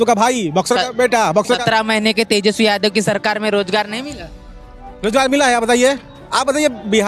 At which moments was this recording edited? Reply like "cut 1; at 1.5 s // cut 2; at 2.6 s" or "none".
none